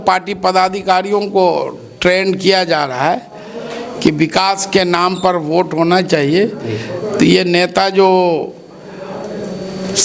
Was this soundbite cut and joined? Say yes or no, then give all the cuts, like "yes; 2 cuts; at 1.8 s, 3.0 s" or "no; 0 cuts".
no; 0 cuts